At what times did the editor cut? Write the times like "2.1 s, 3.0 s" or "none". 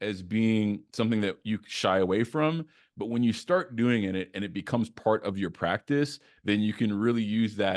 none